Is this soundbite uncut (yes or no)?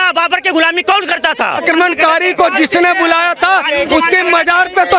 no